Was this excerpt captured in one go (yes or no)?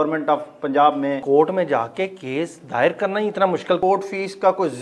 no